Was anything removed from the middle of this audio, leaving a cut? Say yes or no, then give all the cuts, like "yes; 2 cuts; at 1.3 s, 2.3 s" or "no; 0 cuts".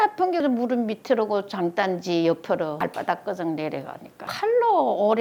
no; 0 cuts